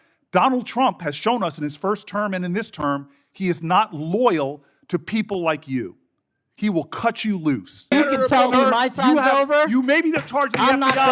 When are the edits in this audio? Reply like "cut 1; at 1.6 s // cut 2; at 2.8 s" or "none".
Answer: cut 1; at 7.8 s

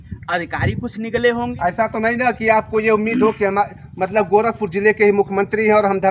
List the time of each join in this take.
cut 1; at 1.5 s

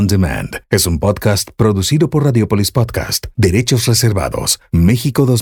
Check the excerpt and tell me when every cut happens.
none

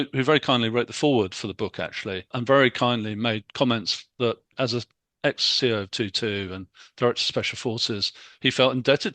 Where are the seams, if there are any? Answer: cut 1; at 2.4 s // cut 2; at 4.5 s

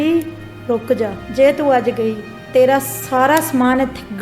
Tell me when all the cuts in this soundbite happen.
cut 1; at 1.2 s

